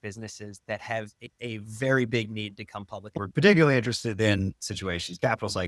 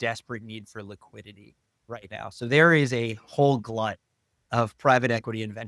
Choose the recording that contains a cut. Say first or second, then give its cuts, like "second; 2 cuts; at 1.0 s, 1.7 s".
first; 3 cuts; at 1.3 s, 3.1 s, 4.6 s